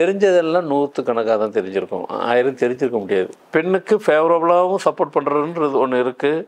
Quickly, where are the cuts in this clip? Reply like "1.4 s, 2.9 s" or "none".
3.4 s